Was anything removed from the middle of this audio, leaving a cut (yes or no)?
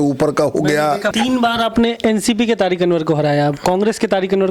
yes